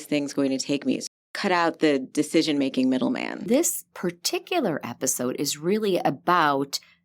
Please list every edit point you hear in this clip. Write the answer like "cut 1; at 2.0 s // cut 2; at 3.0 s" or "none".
cut 1; at 1.2 s // cut 2; at 3.5 s